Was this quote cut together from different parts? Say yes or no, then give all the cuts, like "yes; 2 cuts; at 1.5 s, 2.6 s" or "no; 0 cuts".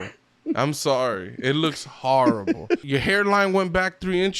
yes; 1 cut; at 2.8 s